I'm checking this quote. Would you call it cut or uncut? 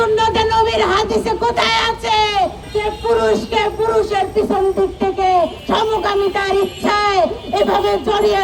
cut